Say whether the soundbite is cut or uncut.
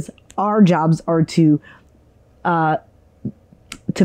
uncut